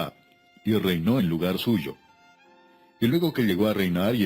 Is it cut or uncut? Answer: cut